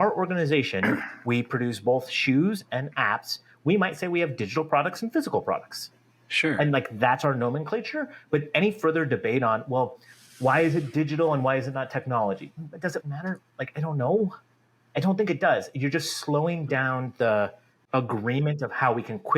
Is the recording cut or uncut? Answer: cut